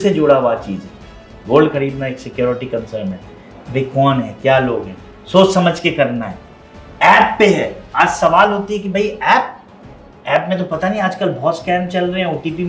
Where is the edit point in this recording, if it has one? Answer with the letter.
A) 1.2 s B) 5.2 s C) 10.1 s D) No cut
D